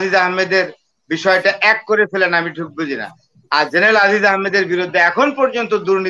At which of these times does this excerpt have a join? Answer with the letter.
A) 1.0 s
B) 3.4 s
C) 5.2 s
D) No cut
D